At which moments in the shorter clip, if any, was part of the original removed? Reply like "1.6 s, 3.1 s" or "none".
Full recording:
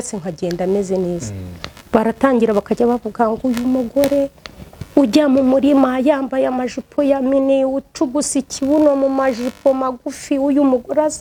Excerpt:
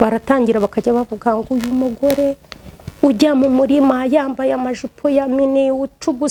none